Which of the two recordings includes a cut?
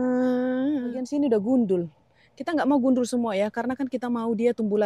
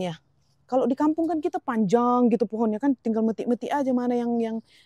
first; 1 cut; at 1.0 s

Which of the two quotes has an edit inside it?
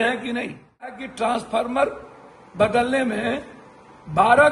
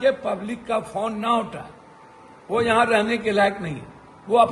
first; 1 cut; at 1.1 s

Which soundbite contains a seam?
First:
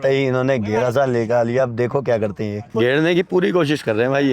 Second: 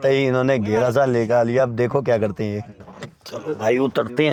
first; 1 cut; at 2.7 s

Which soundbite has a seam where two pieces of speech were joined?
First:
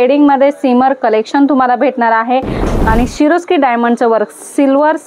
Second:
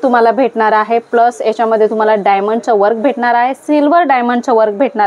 first; 1 cut; at 2.7 s

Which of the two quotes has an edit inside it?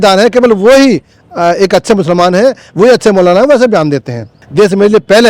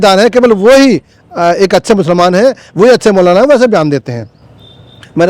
first; 1 cut; at 4.4 s

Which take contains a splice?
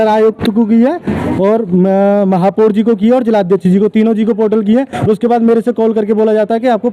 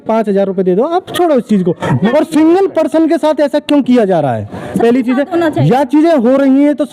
second; 1 cut; at 2.1 s

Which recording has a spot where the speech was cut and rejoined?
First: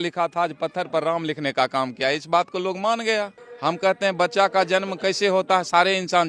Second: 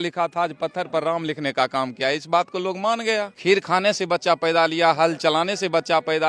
second; 1 cut; at 3.3 s

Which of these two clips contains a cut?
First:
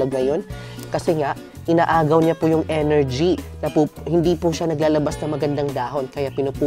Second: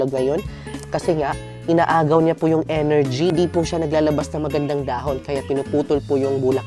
second; 1 cut; at 3.3 s

